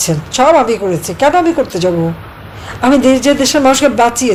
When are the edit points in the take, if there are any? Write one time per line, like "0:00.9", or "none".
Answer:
none

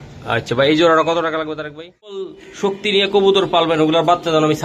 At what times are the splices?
0:02.5

